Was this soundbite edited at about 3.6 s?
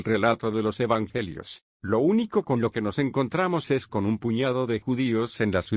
yes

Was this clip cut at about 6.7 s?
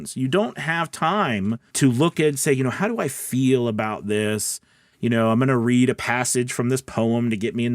no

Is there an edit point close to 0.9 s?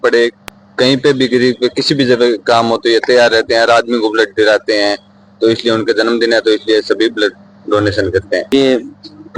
no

